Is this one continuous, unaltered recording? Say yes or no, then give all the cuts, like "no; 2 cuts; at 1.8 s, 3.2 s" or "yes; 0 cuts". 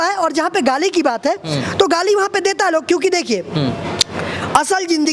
yes; 0 cuts